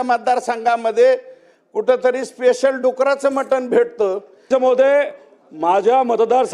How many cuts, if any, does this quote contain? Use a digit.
1